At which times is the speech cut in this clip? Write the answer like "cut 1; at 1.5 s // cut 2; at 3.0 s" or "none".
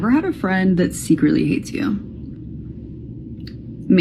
none